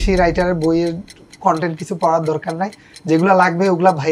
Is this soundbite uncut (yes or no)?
yes